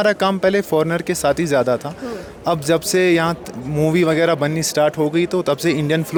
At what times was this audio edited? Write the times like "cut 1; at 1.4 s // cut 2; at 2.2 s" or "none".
none